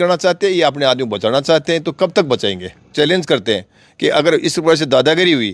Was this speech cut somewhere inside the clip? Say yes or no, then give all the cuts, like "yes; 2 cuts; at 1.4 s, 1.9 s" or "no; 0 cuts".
yes; 1 cut; at 2.9 s